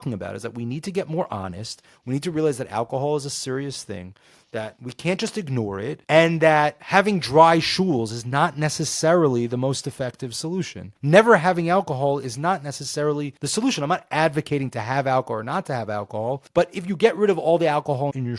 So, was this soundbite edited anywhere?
yes; 3 cuts; at 10.8 s, 13.4 s, 16.4 s

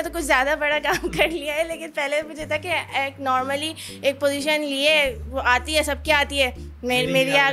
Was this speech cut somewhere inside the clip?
no; 0 cuts

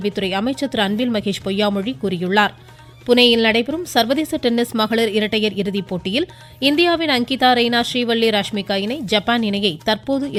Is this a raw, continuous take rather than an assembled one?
yes; 0 cuts

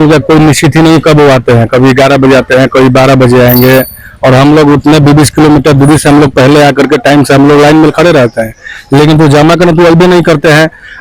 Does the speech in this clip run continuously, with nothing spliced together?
yes; 0 cuts

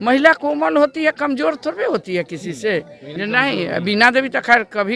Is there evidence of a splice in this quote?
yes; 1 cut; at 3.1 s

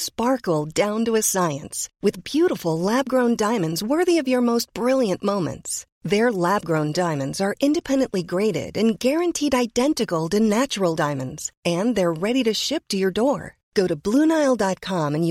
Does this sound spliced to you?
no; 0 cuts

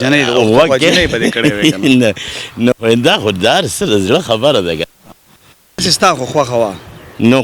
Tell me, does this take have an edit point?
yes; 1 cut; at 5.8 s

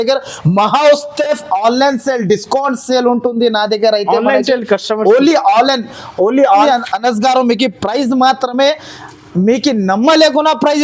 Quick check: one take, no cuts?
no; 1 cut; at 6.6 s

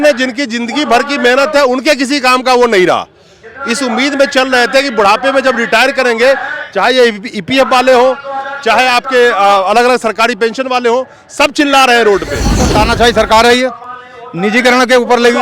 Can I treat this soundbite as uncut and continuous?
no; 1 cut; at 12.6 s

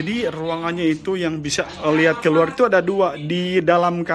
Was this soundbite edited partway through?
no; 0 cuts

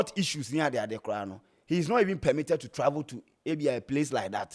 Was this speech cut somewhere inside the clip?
no; 0 cuts

